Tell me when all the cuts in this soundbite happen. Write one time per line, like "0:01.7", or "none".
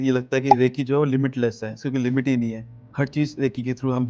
none